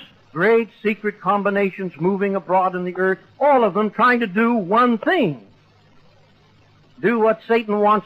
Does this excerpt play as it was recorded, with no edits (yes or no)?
yes